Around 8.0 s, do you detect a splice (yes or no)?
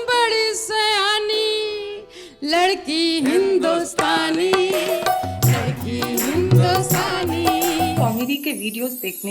yes